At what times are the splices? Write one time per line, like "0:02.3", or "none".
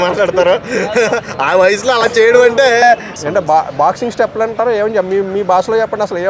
0:03.1